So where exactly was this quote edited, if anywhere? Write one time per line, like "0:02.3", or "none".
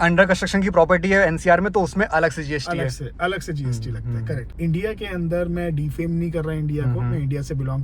0:04.4